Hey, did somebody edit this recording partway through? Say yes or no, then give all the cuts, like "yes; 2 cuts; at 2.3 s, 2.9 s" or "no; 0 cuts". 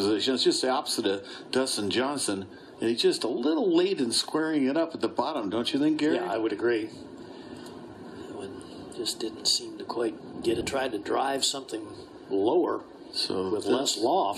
no; 0 cuts